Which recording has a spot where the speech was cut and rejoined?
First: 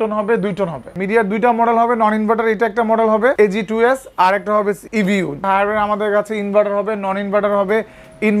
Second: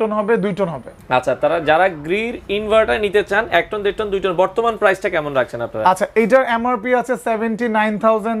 first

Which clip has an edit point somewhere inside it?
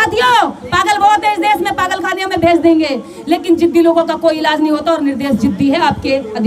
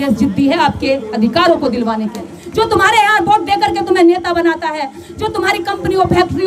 second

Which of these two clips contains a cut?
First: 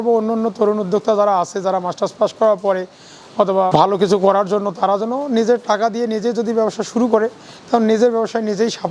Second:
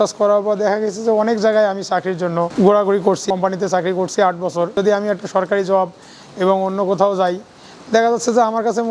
second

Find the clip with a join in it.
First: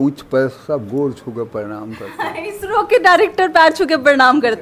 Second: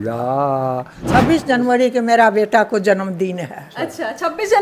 second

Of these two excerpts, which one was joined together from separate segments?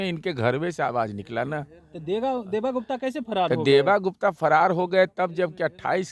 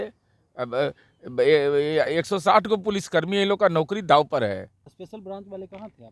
second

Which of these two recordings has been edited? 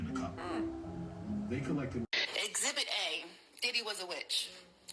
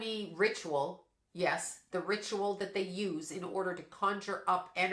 first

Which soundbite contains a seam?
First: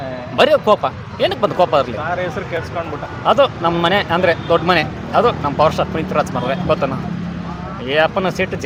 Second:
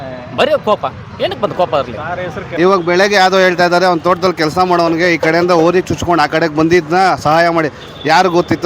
second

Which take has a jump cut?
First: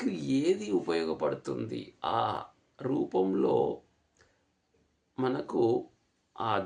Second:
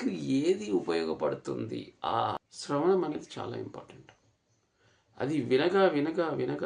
second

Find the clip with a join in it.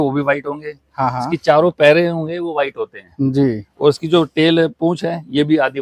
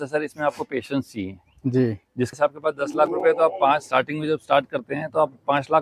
second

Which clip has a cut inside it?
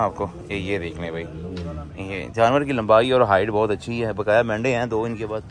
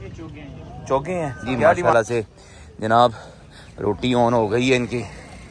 second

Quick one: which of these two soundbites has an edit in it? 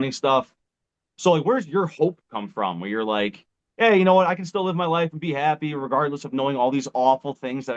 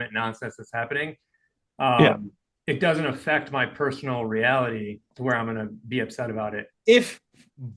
second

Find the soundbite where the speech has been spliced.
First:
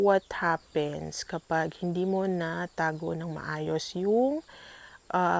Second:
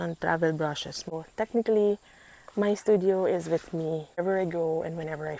second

